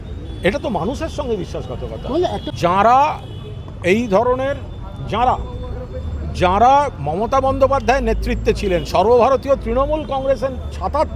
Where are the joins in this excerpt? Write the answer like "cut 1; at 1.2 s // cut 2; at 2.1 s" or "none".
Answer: cut 1; at 2.4 s